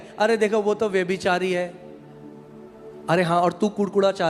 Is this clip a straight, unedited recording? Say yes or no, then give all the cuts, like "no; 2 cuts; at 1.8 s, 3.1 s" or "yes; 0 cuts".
yes; 0 cuts